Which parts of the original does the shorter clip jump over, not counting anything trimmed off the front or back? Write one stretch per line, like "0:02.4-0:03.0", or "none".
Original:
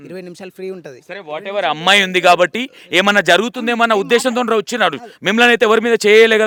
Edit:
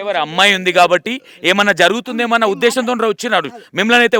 none